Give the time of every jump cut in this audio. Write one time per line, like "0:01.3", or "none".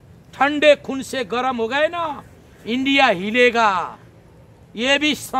none